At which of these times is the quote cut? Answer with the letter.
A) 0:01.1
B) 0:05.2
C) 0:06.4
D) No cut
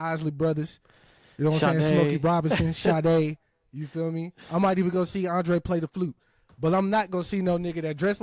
D